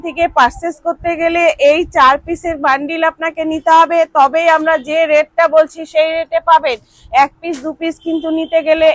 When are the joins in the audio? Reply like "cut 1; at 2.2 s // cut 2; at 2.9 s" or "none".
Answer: none